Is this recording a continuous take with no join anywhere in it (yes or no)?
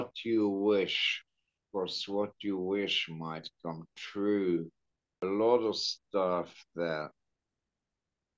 no